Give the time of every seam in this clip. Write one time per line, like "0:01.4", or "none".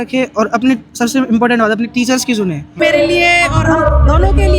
0:02.8